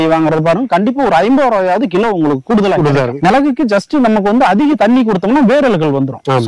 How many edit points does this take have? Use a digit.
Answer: 1